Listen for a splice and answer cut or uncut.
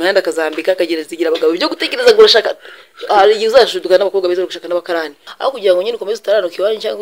cut